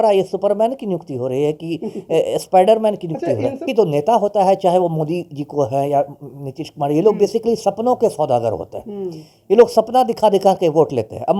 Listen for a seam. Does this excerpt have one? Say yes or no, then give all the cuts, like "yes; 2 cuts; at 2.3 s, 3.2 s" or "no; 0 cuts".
yes; 1 cut; at 3.6 s